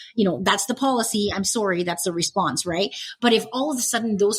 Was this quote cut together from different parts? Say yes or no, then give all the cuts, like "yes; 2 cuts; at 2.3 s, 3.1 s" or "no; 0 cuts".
no; 0 cuts